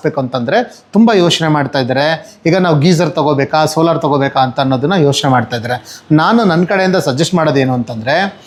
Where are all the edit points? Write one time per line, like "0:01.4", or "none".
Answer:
none